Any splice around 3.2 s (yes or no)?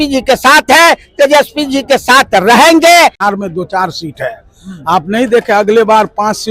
yes